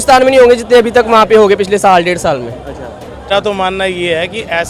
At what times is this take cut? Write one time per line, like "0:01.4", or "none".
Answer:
0:03.3